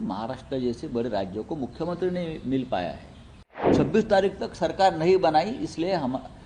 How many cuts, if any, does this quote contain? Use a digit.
1